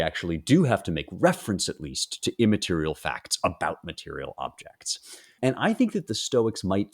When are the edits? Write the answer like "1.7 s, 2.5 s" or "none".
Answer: 5.4 s